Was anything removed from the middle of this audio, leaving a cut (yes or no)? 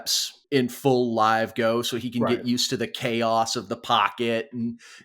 no